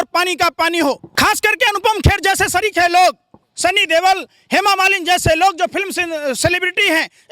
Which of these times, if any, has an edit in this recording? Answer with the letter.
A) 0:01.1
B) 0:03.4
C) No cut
A